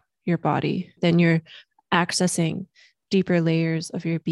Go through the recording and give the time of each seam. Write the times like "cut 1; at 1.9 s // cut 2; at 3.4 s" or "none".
cut 1; at 1.0 s